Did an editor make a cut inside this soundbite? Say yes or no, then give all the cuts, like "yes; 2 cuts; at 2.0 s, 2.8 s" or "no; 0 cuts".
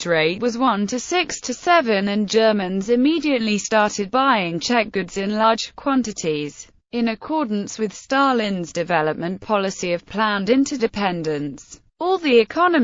yes; 1 cut; at 7.2 s